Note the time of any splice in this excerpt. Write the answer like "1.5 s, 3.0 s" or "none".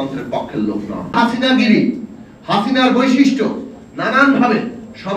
1.2 s